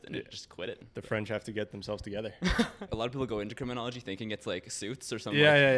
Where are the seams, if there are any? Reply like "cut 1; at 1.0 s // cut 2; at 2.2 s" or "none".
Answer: cut 1; at 0.9 s // cut 2; at 2.9 s